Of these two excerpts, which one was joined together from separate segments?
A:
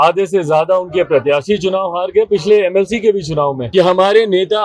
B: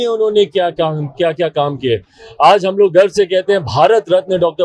A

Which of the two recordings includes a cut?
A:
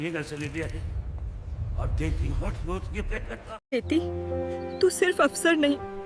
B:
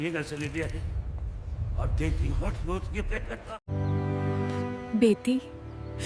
A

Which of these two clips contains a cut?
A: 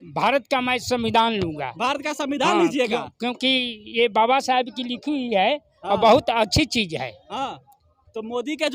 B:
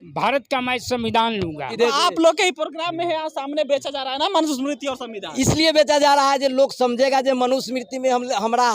B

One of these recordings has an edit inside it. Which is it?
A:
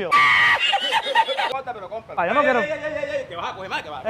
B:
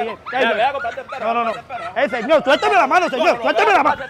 A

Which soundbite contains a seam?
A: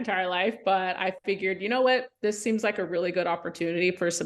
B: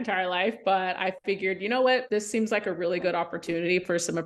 B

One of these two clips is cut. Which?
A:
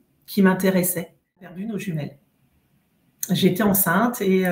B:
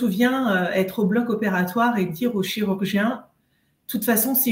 A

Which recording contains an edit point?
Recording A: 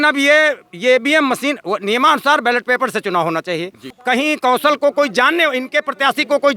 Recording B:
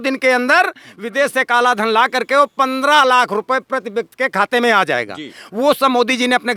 A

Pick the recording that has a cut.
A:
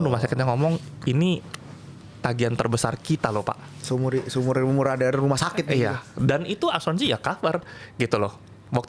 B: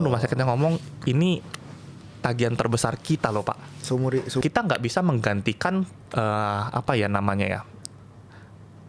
B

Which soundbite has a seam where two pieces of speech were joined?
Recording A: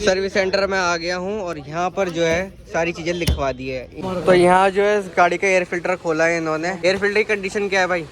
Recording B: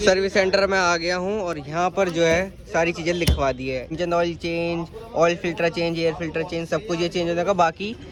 A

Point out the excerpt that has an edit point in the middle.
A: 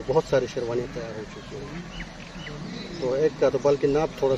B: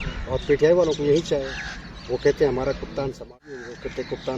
B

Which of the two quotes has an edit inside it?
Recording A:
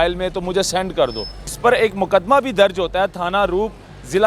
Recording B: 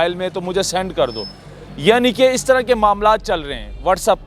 A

